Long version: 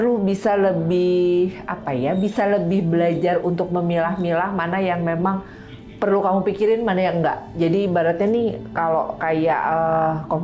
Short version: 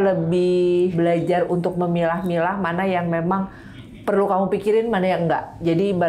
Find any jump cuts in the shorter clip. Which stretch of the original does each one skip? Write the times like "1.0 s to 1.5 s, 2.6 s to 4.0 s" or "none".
1.5 s to 2.9 s